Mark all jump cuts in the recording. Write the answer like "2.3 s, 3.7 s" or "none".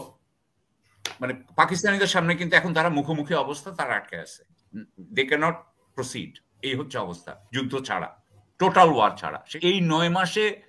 9.5 s